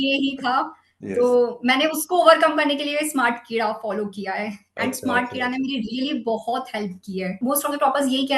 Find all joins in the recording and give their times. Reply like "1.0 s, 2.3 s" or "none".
7.4 s